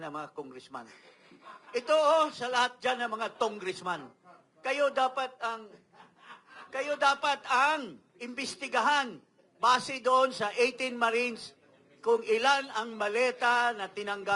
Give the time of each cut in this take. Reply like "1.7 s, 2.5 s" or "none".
none